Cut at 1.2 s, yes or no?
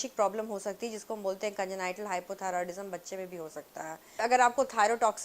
no